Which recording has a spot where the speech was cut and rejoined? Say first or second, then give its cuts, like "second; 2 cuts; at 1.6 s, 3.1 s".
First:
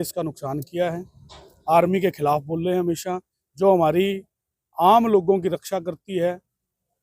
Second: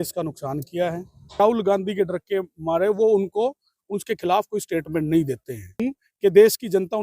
second; 2 cuts; at 1.4 s, 5.8 s